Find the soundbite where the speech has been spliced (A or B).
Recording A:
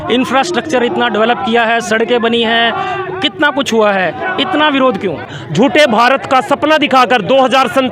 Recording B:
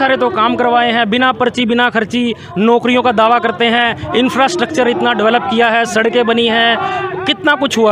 A